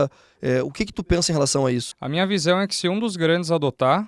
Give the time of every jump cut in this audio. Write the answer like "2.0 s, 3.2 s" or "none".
2.0 s